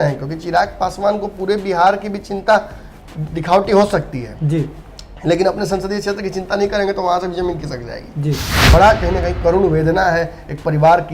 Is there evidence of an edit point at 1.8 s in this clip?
no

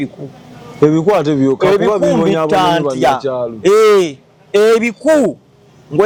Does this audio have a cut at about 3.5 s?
no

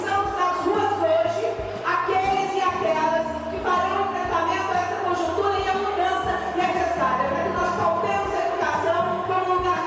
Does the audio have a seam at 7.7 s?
no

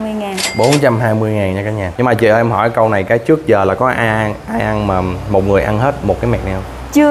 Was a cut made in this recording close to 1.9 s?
yes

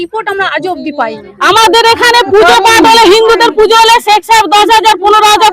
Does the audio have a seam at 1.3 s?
yes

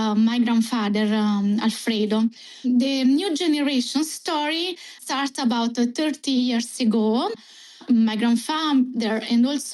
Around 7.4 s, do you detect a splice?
yes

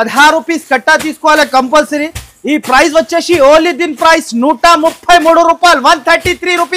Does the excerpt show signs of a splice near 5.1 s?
no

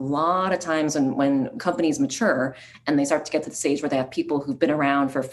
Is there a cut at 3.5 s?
no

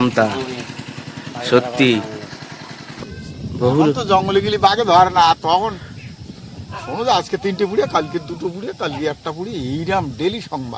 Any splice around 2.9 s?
yes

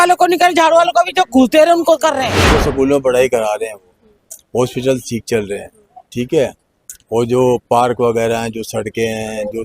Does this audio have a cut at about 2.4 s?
yes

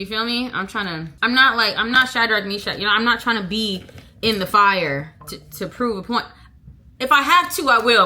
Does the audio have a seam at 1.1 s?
yes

